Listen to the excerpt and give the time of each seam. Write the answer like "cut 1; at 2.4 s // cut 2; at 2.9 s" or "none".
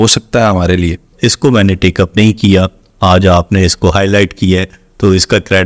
cut 1; at 1.1 s